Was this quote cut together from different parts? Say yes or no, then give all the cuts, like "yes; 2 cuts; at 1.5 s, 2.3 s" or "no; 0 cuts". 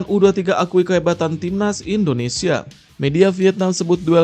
yes; 1 cut; at 2.8 s